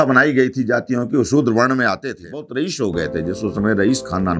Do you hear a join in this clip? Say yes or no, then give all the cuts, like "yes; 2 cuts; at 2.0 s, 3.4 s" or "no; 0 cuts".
yes; 1 cut; at 2.5 s